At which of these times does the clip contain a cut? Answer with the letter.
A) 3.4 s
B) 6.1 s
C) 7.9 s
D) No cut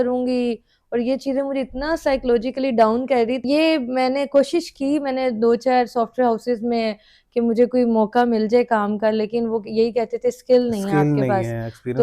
A